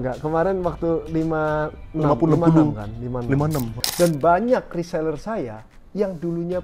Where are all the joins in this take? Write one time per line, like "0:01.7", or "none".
0:03.8